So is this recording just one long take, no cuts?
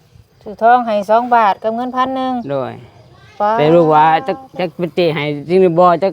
yes; 0 cuts

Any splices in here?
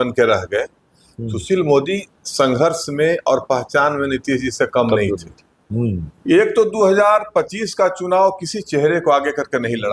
yes; 1 cut; at 6.1 s

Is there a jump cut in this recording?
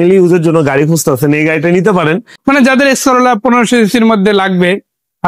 yes; 1 cut; at 2.3 s

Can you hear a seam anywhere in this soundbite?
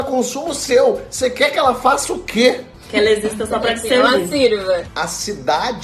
yes; 2 cuts; at 2.7 s, 4.9 s

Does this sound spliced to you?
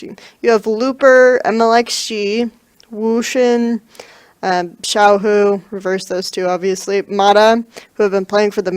yes; 1 cut; at 2.1 s

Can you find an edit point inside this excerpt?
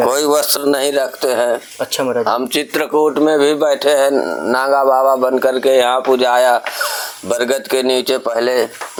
no; 0 cuts

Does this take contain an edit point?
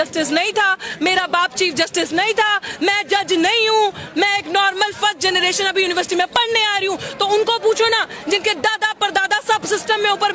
no; 0 cuts

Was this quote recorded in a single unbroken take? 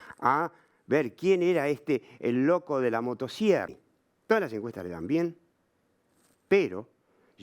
no; 1 cut; at 3.8 s

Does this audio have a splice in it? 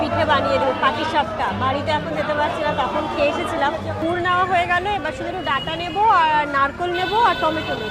yes; 1 cut; at 4.0 s

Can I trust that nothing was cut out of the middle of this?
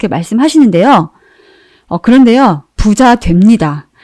no; 1 cut; at 2.7 s

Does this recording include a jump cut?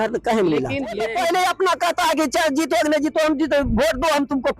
yes; 1 cut; at 1.0 s

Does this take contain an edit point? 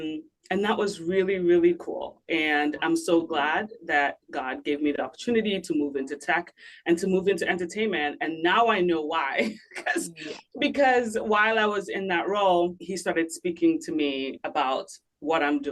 yes; 1 cut; at 12.9 s

